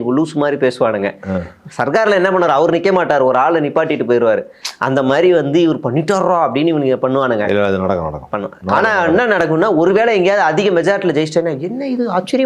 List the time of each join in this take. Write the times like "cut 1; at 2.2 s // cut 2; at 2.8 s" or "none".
none